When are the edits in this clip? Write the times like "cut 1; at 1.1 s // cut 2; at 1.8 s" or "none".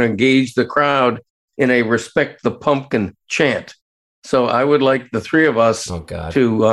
none

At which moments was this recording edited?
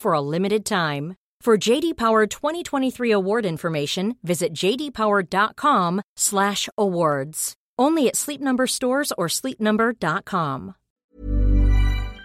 cut 1; at 11.0 s

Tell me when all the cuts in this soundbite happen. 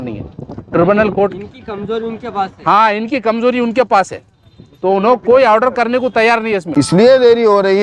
cut 1; at 6.7 s

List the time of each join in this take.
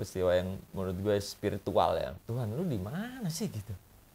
cut 1; at 2.2 s

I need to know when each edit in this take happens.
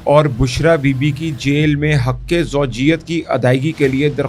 none

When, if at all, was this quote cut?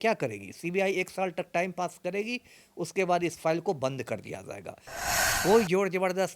cut 1; at 4.8 s

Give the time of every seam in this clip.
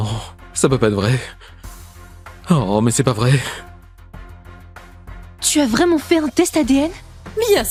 none

